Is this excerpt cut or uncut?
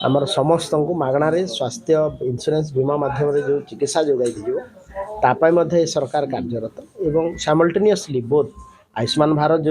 uncut